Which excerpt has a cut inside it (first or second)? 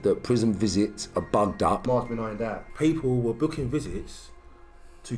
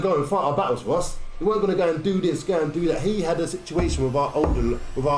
first